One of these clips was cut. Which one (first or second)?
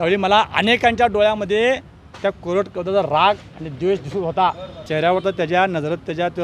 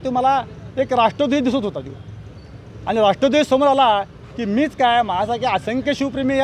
first